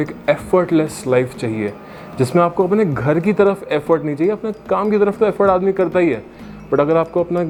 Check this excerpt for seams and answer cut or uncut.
uncut